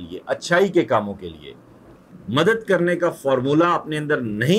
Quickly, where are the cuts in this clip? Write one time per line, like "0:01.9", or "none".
0:02.1